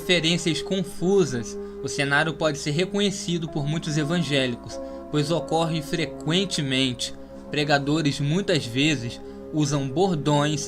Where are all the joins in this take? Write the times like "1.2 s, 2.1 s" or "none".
7.8 s